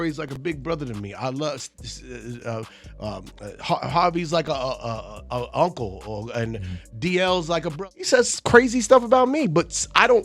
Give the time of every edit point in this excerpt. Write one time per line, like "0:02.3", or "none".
0:07.9